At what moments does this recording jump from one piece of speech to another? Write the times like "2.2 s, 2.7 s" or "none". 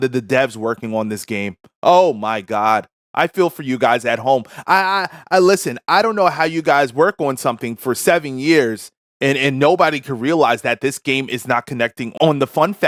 none